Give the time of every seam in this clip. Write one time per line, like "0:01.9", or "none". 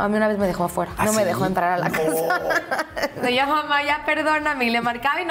0:00.9
0:03.2